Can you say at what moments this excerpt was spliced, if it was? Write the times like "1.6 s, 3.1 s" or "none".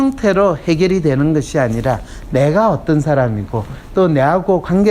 none